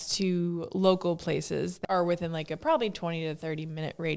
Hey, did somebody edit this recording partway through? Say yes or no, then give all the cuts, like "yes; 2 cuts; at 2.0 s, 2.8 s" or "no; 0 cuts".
yes; 1 cut; at 1.7 s